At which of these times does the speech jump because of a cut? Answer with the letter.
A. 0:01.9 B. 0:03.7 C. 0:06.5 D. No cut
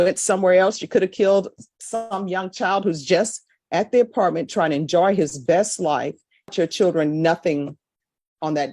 C